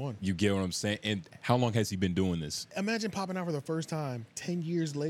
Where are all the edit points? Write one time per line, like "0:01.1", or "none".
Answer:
0:02.6

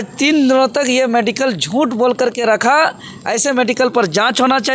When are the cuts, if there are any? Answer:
none

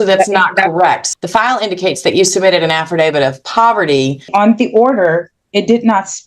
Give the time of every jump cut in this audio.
0:01.0
0:04.3

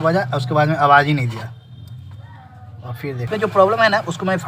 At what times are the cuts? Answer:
0:03.3

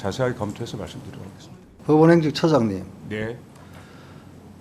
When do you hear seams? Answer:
0:01.6

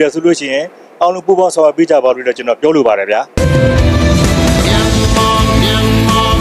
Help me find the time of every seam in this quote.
0:03.3

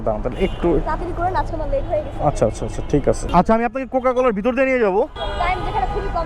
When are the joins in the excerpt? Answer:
0:03.2
0:05.2

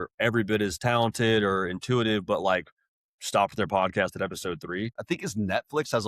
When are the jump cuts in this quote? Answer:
0:05.0

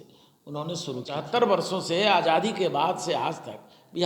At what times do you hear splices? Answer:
0:01.1

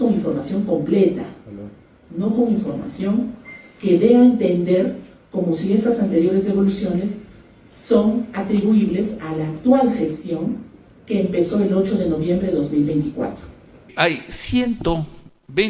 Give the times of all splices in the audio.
0:13.9

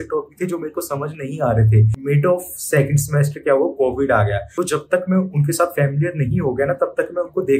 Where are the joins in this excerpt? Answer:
0:01.9
0:04.4

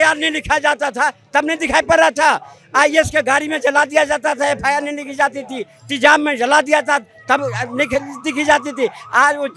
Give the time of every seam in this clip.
none

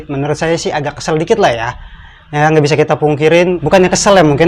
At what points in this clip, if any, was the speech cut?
none

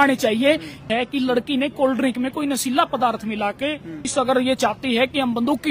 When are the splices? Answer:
0:00.9
0:04.1

